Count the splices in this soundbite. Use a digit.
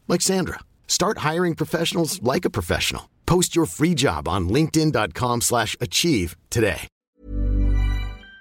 1